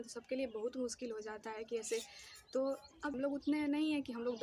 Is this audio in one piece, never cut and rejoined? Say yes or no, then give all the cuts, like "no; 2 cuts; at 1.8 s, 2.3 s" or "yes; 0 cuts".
no; 1 cut; at 3.1 s